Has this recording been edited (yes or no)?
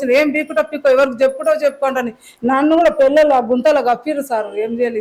no